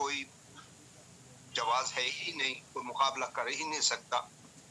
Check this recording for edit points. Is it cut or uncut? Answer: uncut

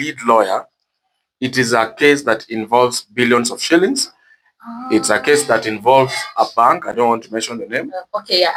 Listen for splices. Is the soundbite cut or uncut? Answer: uncut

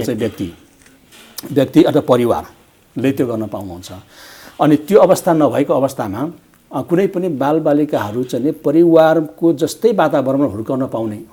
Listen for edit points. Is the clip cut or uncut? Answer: uncut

